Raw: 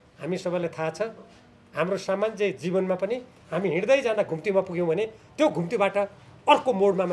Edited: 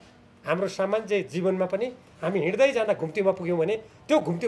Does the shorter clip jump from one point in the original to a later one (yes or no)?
no